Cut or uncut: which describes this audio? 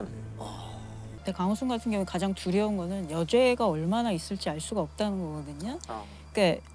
uncut